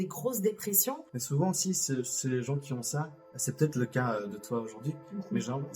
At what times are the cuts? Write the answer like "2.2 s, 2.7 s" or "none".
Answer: 1.1 s